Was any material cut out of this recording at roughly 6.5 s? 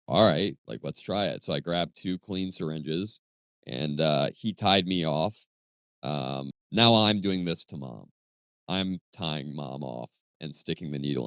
yes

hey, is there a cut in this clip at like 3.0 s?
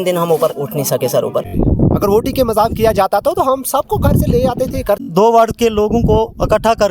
no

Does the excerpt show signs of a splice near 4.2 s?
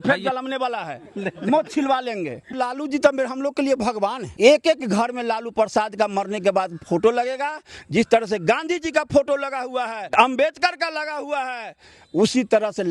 yes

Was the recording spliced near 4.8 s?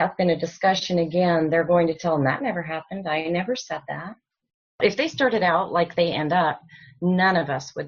yes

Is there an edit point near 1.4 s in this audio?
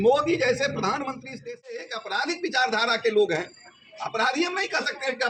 yes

